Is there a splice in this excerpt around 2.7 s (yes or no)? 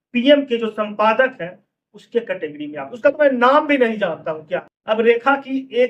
no